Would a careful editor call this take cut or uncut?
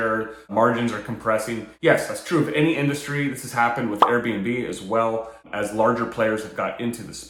uncut